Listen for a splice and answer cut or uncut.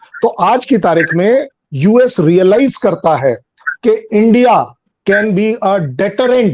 uncut